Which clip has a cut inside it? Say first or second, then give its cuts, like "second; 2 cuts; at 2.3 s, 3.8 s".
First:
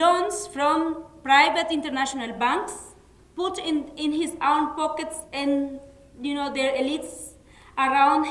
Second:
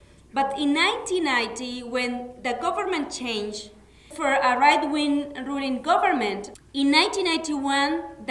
second; 2 cuts; at 4.1 s, 6.5 s